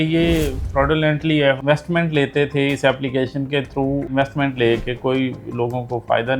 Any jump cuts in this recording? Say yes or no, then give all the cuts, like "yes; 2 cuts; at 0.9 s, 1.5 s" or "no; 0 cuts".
yes; 1 cut; at 1.6 s